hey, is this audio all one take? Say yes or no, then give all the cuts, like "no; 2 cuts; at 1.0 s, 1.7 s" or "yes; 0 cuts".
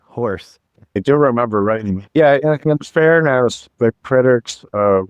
no; 3 cuts; at 1.0 s, 2.0 s, 3.6 s